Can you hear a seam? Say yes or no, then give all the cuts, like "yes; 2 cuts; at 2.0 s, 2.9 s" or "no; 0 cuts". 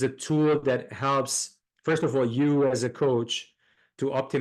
no; 0 cuts